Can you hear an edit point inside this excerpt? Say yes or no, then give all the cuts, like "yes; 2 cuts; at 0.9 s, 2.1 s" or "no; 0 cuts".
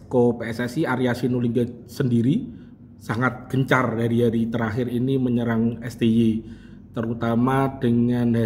no; 0 cuts